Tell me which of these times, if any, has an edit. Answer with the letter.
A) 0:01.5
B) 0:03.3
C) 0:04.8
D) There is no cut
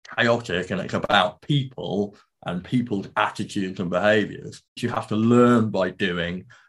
C